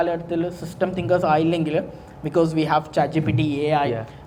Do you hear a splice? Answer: no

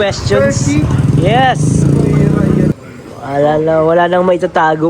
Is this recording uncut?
no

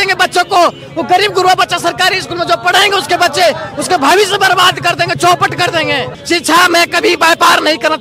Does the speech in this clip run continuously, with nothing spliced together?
yes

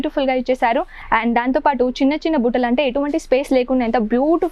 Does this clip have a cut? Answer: yes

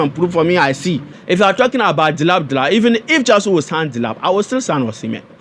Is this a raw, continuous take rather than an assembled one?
no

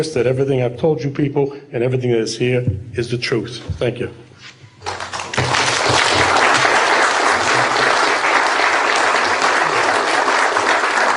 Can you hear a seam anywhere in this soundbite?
no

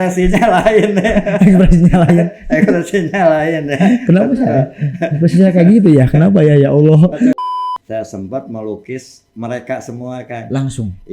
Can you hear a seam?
yes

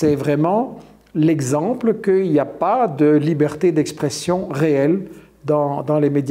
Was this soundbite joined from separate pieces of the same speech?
no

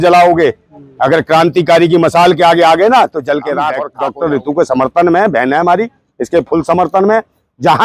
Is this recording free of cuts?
no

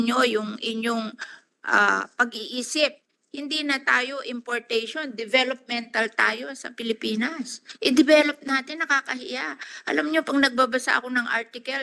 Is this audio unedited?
yes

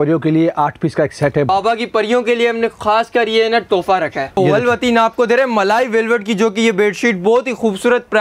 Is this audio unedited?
no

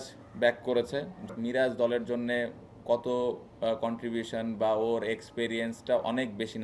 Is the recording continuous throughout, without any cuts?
no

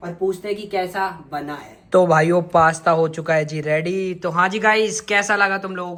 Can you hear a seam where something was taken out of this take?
no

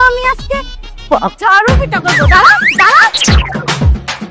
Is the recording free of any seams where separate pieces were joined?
no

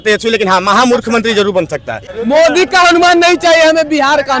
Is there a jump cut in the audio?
yes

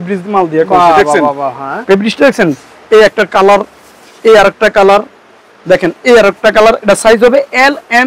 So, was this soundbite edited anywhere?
no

